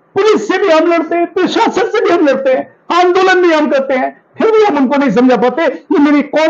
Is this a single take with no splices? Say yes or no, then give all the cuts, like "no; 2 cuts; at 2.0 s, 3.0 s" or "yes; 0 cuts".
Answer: yes; 0 cuts